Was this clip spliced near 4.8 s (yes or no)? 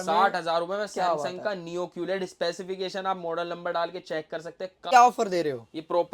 yes